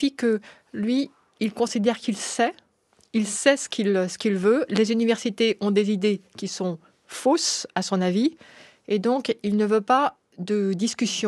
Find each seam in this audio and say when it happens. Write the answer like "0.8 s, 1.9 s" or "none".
none

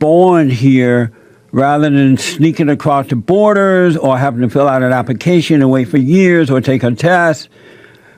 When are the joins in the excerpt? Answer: none

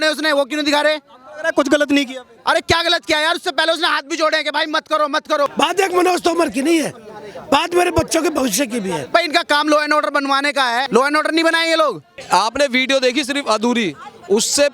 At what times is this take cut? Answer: 5.5 s, 9.0 s, 10.9 s, 12.1 s

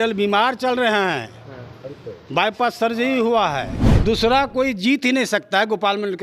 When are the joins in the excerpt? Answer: 3.9 s

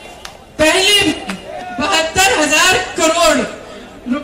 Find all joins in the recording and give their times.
1.5 s

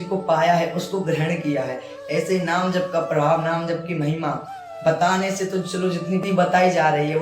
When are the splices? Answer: 6.2 s

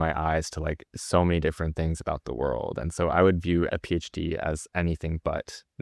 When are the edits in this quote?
3.7 s

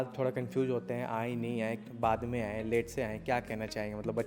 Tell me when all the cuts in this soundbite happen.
none

